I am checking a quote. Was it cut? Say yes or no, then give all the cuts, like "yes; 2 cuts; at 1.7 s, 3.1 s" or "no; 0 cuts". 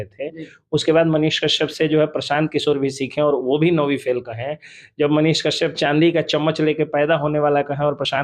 no; 0 cuts